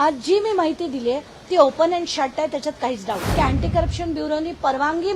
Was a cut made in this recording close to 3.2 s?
yes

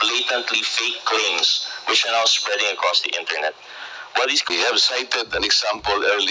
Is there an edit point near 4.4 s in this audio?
yes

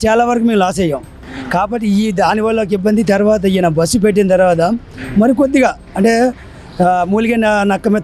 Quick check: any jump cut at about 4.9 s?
no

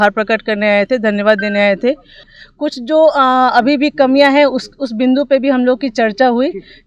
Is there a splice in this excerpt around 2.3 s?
yes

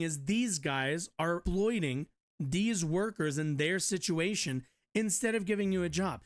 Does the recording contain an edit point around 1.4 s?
yes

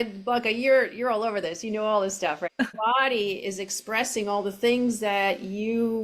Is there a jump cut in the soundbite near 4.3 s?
no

